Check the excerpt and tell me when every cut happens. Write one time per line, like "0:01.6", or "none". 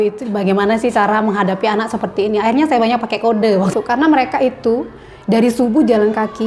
0:03.7

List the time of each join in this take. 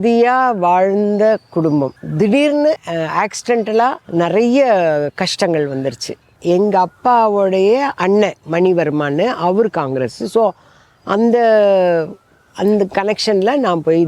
0:02.0
0:02.9
0:04.0
0:06.4

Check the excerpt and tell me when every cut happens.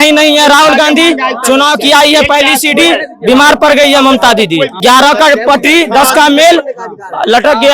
0:04.7

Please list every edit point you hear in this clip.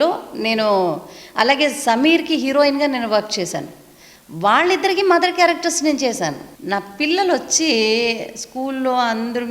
0:06.5

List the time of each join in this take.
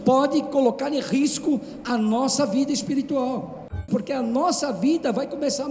0:03.8

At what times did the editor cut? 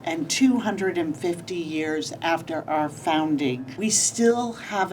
0:03.7

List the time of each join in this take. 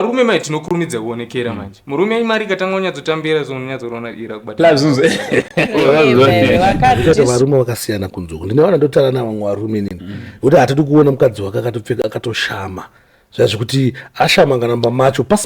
0:07.0

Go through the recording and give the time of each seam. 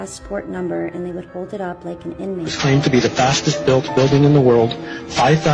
0:02.5

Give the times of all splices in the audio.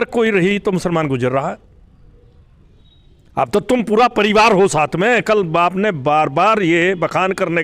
0:02.8

